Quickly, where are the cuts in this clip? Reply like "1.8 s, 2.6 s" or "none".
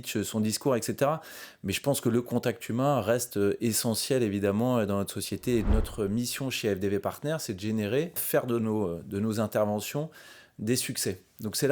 5.7 s, 8.2 s